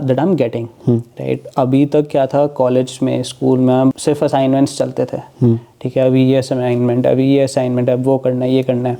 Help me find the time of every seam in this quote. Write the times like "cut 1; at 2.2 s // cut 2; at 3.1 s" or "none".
cut 1; at 4.0 s